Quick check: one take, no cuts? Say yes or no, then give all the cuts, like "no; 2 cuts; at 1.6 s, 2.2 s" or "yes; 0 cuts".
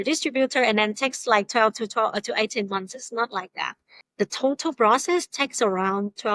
no; 1 cut; at 4.0 s